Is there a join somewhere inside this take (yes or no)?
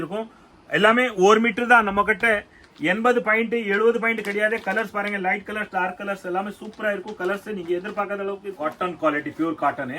yes